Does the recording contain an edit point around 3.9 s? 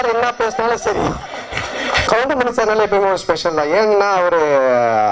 no; 1 cut; at 2.0 s

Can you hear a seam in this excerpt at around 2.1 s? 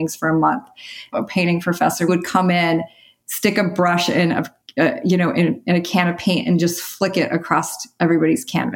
yes; 2 cuts; at 1.1 s, 2.1 s

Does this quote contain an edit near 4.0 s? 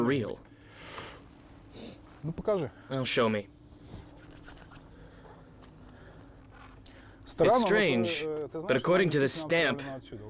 no; 0 cuts

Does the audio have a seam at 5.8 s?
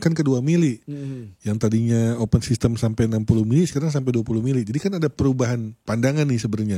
yes; 1 cut; at 5.8 s

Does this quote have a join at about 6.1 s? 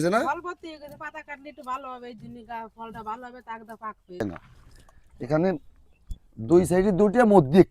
no; 1 cut; at 4.2 s

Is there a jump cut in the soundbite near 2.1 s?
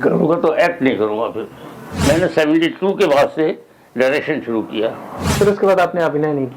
yes; 2 cuts; at 2.1 s, 5.3 s

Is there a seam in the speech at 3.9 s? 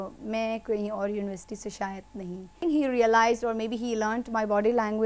no; 1 cut; at 2.6 s

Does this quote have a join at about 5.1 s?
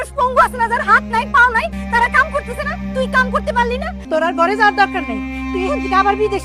no; 2 cuts; at 1.8 s, 3.9 s

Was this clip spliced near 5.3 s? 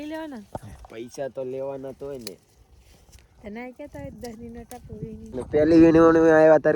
yes; 1 cut; at 5.3 s

